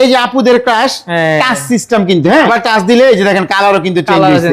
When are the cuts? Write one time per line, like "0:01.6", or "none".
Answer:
0:02.5